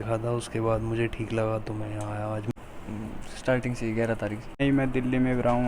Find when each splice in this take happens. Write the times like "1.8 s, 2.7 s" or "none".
2.5 s, 4.6 s